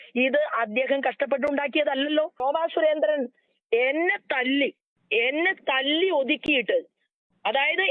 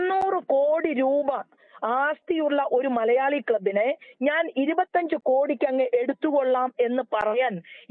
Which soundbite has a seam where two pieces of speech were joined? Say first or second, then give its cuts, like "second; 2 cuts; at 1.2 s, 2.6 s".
first; 1 cut; at 2.4 s